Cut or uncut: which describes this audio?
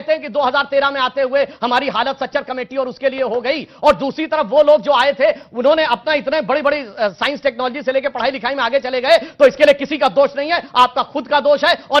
uncut